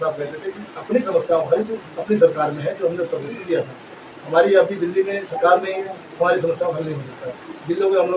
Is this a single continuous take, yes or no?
yes